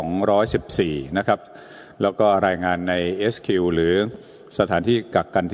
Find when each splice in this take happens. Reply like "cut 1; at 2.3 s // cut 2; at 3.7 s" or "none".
none